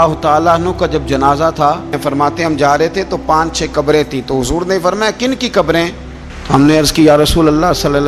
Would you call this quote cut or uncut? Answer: cut